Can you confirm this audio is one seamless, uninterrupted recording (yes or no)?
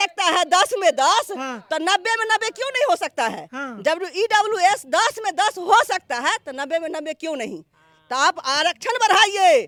yes